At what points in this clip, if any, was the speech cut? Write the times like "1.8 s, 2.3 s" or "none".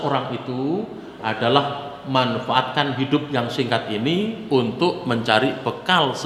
none